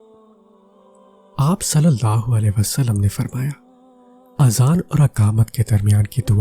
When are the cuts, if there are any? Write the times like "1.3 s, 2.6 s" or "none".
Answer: 1.4 s